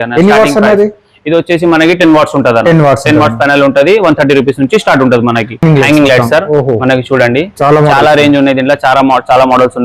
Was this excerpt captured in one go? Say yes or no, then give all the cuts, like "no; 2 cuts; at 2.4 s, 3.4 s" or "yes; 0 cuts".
no; 1 cut; at 5.6 s